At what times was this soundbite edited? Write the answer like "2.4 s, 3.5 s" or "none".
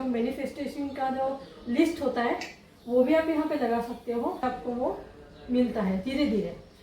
4.4 s

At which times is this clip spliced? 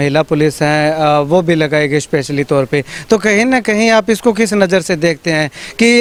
none

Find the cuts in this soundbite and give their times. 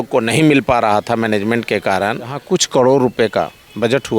2.8 s

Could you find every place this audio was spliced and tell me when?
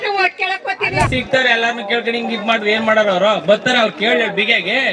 1.1 s

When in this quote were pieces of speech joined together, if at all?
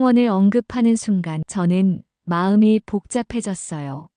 1.4 s

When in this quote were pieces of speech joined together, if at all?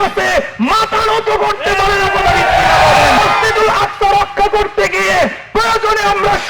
3.2 s

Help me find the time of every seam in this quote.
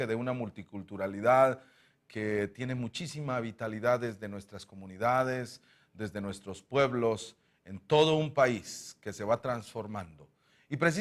1.1 s

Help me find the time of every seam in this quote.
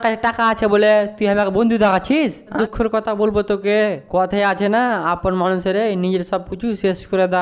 2.5 s

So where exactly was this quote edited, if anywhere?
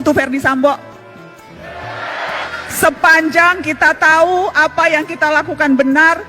2.5 s

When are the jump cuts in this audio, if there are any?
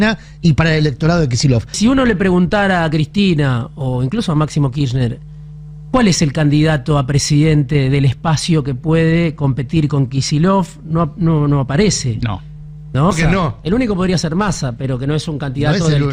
1.8 s, 13.1 s

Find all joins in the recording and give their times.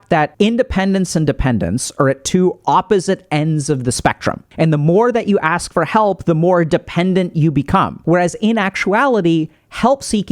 4.4 s, 8.0 s

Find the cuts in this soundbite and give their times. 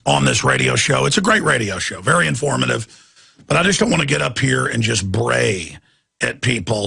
2.7 s

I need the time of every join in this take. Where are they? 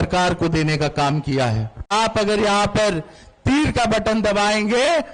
1.9 s

